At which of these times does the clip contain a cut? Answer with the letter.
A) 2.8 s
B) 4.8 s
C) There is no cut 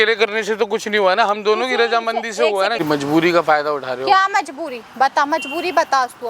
A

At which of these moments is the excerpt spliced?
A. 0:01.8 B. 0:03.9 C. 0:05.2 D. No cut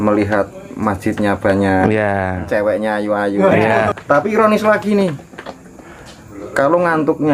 B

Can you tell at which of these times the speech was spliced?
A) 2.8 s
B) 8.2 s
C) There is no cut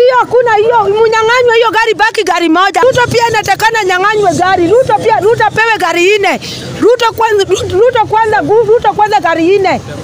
A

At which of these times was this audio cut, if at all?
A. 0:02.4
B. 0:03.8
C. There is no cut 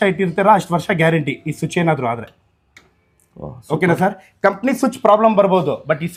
C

